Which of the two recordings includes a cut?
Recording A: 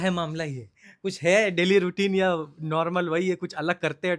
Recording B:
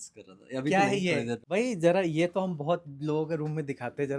B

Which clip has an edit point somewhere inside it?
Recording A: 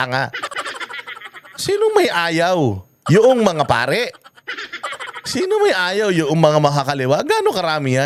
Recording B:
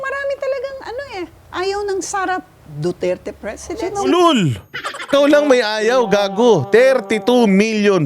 B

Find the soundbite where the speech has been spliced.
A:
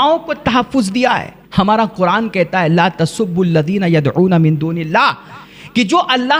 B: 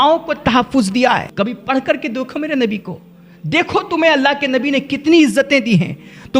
B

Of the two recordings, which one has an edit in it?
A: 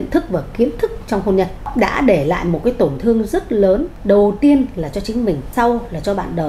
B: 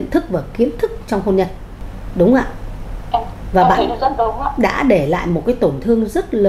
A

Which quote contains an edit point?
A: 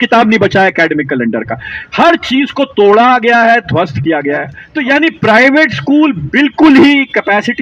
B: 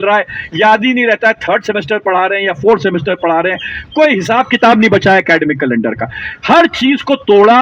A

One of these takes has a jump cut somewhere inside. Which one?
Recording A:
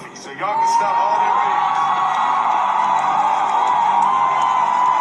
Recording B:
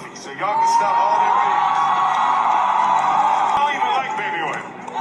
B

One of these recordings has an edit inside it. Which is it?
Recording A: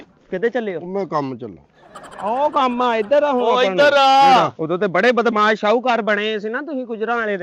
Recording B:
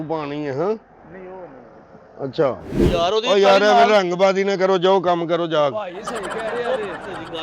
B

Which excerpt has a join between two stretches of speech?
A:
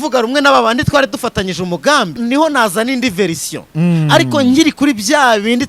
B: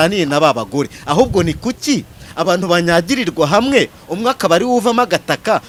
A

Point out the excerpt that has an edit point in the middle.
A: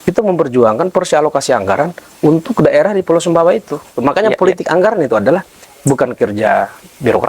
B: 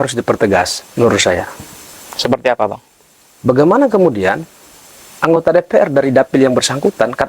A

